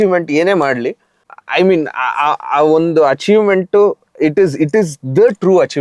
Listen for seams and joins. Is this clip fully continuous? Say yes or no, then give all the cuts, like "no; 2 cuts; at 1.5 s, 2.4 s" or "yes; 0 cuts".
yes; 0 cuts